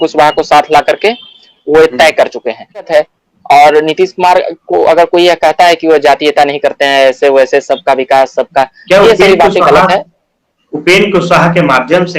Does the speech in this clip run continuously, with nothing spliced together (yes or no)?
no